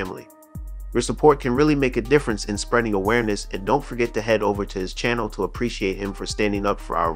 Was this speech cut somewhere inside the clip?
no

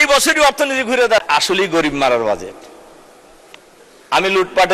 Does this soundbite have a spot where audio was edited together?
yes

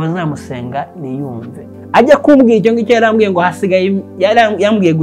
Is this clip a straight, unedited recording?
no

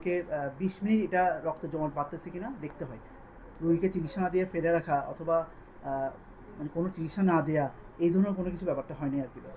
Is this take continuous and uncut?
no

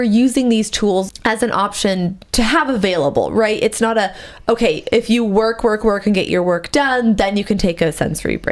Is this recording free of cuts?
no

